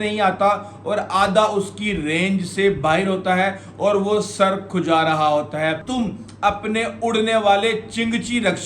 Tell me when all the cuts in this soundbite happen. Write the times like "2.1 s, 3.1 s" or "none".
5.8 s